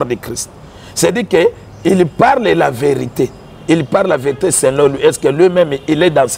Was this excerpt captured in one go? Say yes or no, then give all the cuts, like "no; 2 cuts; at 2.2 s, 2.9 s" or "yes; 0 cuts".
yes; 0 cuts